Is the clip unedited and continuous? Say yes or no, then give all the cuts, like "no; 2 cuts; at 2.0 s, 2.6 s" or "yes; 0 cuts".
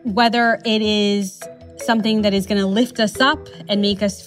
yes; 0 cuts